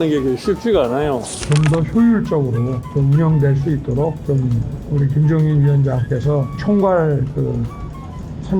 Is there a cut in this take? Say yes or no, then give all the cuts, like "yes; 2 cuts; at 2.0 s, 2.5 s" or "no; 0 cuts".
yes; 1 cut; at 1.5 s